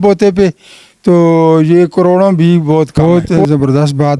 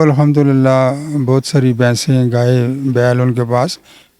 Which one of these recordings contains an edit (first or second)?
first